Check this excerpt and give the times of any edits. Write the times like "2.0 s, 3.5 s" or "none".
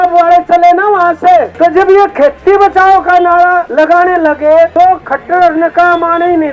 1.5 s, 3.7 s, 4.7 s